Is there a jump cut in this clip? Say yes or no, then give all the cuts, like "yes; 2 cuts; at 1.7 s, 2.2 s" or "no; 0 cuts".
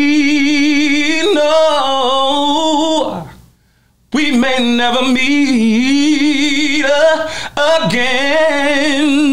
no; 0 cuts